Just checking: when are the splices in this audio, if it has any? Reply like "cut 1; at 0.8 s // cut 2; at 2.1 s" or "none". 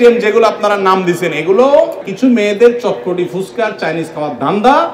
cut 1; at 2.0 s